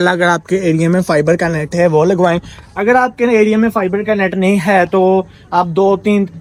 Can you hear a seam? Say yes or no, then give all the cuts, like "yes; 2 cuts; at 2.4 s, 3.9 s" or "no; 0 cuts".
no; 0 cuts